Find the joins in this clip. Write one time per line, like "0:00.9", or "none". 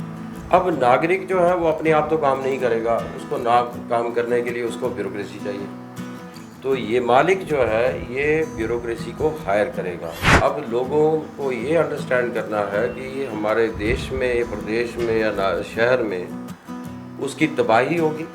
0:10.2